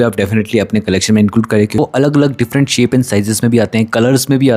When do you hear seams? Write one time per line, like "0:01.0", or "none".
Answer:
0:01.8